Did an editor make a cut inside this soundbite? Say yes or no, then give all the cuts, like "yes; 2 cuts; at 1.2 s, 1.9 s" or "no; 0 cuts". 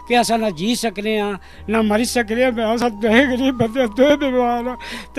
no; 0 cuts